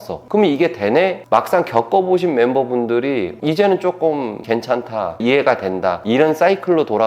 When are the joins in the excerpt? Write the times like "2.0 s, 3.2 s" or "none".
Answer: 1.2 s